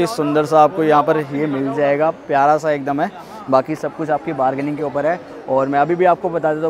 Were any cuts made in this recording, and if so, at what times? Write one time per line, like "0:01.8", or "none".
none